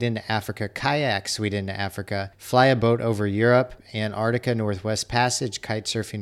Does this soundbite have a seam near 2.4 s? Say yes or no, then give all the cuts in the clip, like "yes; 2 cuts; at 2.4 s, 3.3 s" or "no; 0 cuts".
yes; 2 cuts; at 2.4 s, 3.9 s